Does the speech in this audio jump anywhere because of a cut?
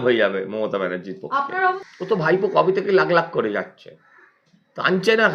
yes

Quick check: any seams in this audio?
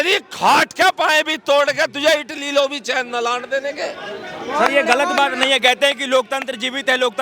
no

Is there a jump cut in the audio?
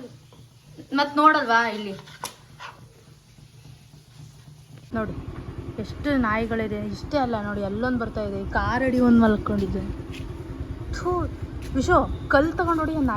yes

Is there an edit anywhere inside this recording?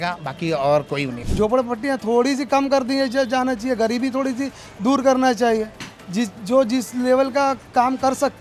yes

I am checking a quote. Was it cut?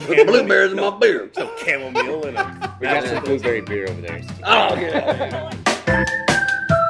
no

